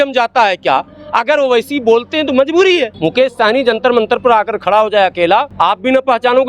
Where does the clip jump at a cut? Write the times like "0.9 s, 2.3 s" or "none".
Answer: 2.9 s, 5.5 s